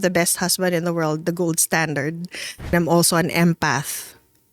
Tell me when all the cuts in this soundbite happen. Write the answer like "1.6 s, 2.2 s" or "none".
2.7 s